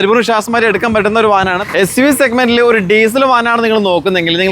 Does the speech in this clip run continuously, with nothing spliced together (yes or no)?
no